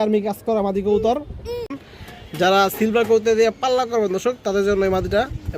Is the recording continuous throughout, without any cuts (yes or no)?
no